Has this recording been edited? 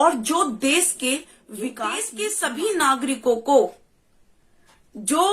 yes; 1 cut; at 2.1 s

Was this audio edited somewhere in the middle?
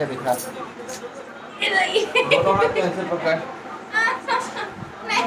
no; 0 cuts

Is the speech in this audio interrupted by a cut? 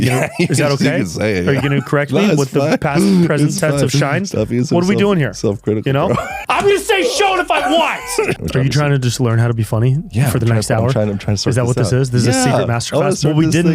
yes; 3 cuts; at 1.9 s, 6.4 s, 8.4 s

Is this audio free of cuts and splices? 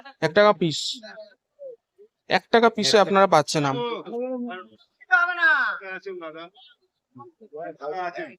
yes; 0 cuts

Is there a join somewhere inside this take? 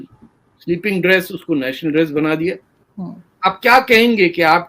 yes; 1 cut; at 2.7 s

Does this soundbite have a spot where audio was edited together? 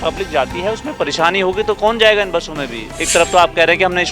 yes; 1 cut; at 2.9 s

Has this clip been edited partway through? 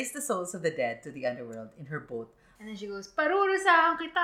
yes; 1 cut; at 2.5 s

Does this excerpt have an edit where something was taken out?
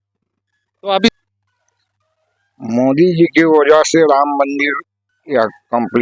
yes; 1 cut; at 1.1 s

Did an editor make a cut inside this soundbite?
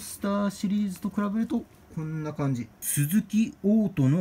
yes; 1 cut; at 2.8 s

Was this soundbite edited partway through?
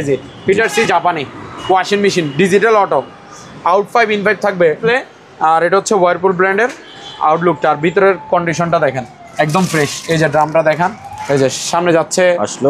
yes; 2 cuts; at 4.8 s, 11.1 s

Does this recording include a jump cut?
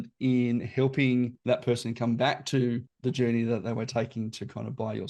yes; 1 cut; at 1.4 s

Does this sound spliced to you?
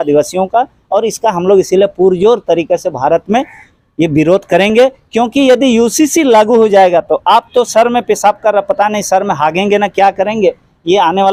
no; 0 cuts

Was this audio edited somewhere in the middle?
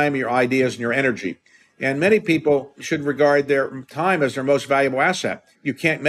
yes; 1 cut; at 2.8 s

